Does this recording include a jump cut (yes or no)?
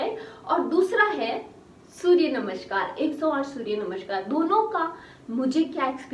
no